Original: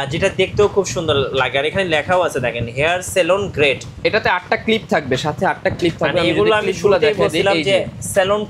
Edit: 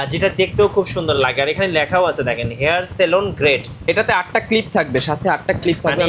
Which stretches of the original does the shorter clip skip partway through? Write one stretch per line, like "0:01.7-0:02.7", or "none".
0:01.2-0:01.4